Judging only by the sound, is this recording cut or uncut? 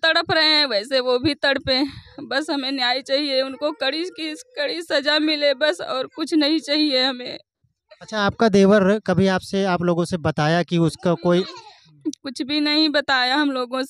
uncut